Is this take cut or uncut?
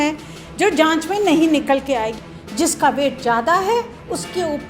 cut